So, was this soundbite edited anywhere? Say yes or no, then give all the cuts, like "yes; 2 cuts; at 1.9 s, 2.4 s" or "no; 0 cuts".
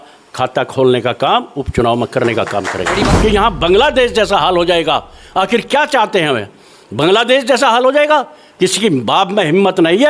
yes; 1 cut; at 3.1 s